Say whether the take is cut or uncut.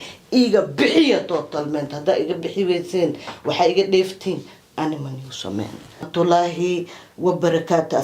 cut